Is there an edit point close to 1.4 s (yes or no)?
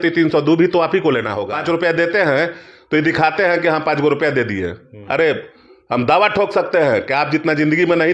yes